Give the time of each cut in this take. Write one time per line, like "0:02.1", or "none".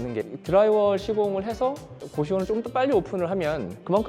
0:02.0